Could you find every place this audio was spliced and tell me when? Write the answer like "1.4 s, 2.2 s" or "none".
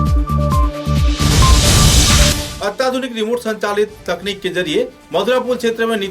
2.3 s